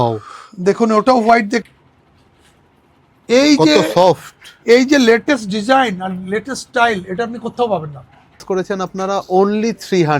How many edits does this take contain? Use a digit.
2